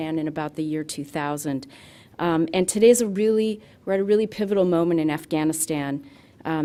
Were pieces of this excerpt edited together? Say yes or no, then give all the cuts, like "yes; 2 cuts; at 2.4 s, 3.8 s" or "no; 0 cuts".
no; 0 cuts